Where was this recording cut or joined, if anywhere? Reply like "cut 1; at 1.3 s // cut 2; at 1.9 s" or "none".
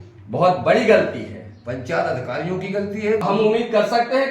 cut 1; at 3.2 s